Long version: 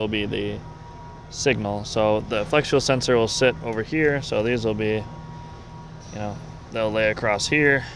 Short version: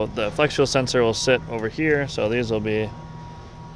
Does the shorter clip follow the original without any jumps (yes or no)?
yes